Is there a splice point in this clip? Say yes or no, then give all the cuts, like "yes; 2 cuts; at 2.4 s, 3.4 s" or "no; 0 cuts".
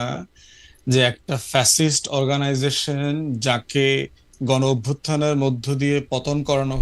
no; 0 cuts